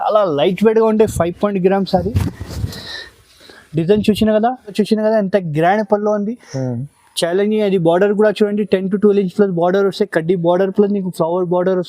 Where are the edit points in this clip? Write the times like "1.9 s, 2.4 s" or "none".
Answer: 4.7 s

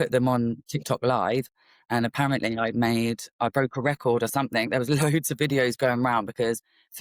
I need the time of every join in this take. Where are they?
none

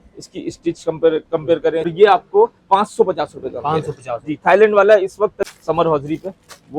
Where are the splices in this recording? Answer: 1.9 s, 5.4 s

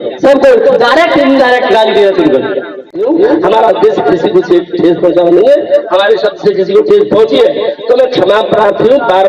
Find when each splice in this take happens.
2.9 s

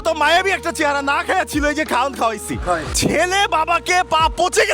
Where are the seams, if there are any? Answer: 2.9 s

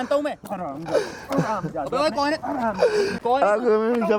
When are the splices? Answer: 3.2 s

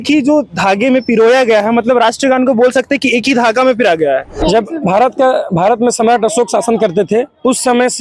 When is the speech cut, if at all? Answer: 4.3 s

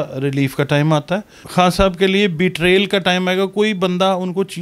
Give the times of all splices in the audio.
1.4 s

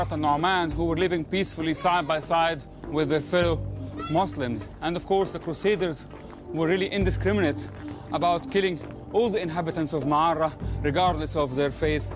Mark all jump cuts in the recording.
1.9 s

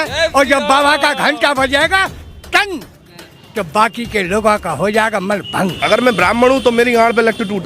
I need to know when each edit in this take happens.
5.8 s

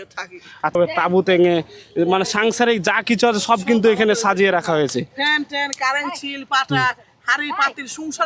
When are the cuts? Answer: none

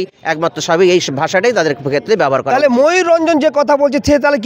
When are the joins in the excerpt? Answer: none

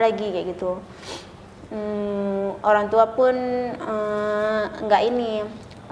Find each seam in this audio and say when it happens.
none

